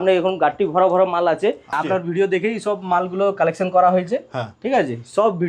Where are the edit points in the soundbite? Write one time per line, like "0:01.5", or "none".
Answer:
0:01.8